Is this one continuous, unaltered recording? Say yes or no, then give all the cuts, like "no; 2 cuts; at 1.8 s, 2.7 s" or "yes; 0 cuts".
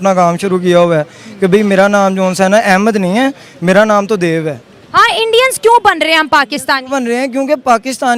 yes; 0 cuts